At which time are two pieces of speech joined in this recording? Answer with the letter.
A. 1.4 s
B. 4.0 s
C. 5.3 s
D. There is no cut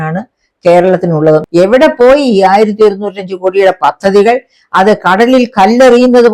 A